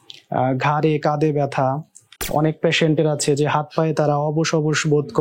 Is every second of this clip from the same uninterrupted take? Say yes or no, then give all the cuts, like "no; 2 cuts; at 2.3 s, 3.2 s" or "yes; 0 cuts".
no; 1 cut; at 2.1 s